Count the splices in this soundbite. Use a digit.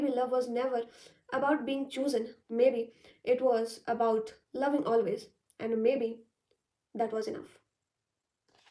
0